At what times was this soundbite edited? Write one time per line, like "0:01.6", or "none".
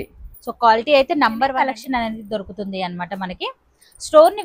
0:01.6